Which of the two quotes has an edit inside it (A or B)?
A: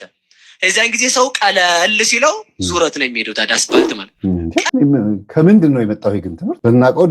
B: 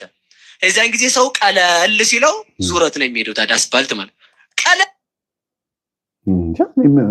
A